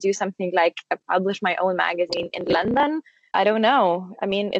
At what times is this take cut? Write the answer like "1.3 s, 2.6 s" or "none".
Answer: 3.2 s

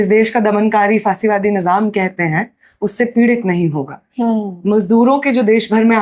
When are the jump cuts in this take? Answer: none

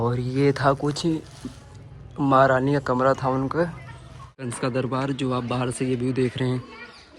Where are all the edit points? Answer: 4.5 s

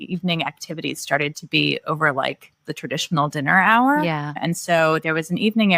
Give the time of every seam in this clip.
4.3 s

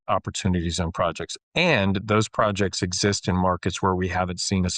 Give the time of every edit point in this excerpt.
none

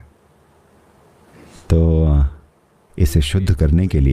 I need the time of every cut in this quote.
1.3 s

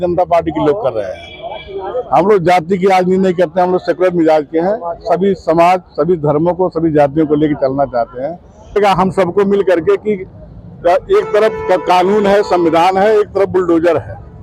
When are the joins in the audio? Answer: 8.8 s

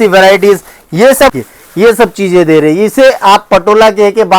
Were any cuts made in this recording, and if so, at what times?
1.3 s

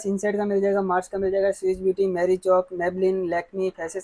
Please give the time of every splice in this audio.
none

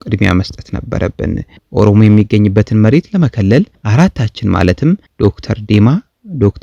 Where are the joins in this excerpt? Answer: 5.1 s

